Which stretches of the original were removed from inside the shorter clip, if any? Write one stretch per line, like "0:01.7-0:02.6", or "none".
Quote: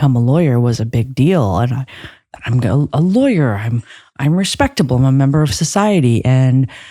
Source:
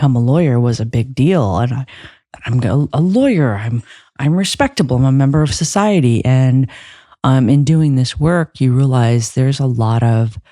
none